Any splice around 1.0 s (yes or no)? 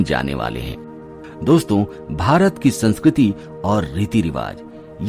yes